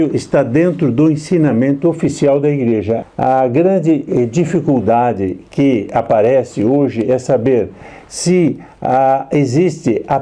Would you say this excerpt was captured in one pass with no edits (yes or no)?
no